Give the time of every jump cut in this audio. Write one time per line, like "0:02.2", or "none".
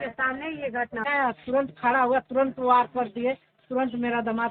0:01.0